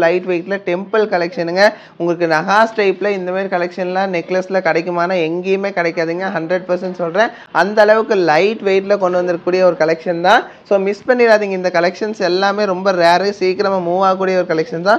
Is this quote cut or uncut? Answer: uncut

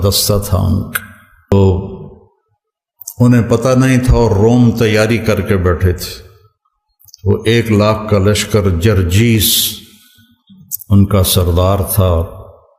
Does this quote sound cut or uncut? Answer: cut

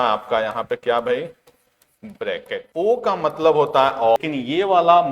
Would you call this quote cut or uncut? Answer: cut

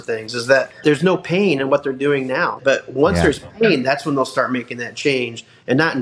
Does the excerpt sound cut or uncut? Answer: cut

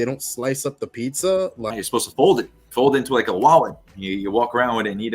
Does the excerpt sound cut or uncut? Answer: cut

